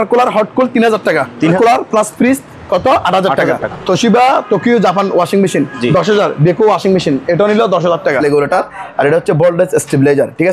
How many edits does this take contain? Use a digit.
3